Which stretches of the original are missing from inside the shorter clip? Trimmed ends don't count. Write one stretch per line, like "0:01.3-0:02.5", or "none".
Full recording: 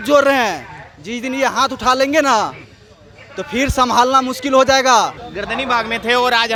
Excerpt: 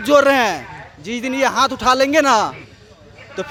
none

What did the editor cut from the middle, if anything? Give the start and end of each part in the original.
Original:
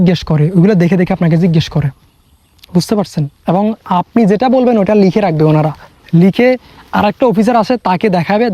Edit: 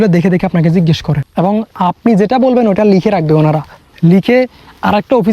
0:01.9-0:03.4

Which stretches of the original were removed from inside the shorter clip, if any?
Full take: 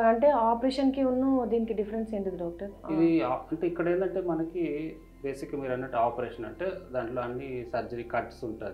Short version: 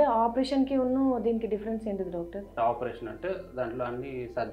0:02.8-0:05.9

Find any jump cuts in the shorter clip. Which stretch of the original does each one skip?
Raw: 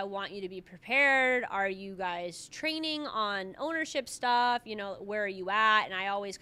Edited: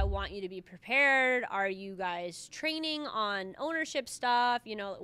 none

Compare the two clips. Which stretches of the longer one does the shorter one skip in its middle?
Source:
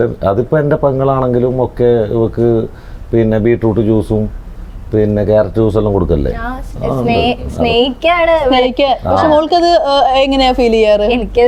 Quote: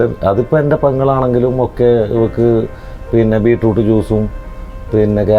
none

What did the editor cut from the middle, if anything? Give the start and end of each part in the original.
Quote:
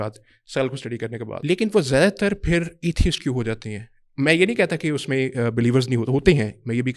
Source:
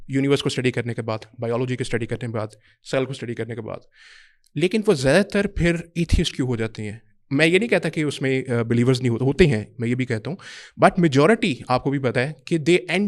0:03.7-0:04.5

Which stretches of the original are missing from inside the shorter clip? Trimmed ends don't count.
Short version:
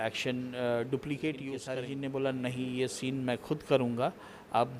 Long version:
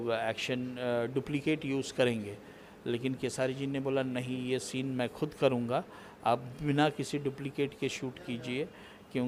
0:01.8-0:03.3

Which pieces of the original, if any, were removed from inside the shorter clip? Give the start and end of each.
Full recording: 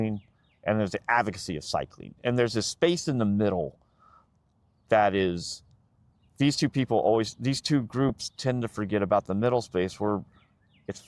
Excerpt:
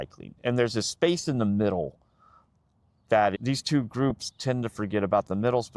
0:05.1-0:07.3

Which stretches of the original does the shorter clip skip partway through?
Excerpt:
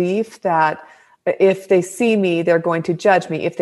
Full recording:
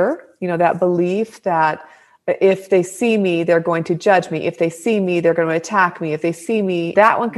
none

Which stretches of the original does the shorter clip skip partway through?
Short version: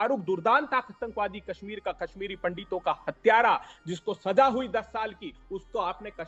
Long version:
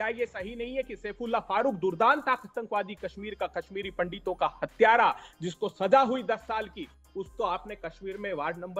0:06.9-0:07.0

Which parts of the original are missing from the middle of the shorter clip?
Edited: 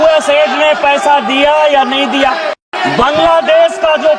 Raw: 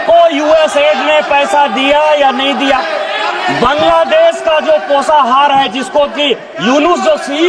0:03.1-0:03.3

